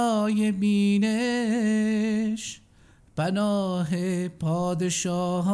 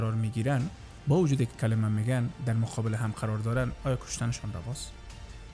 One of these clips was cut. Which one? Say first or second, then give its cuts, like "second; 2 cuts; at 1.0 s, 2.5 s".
second; 1 cut; at 0.9 s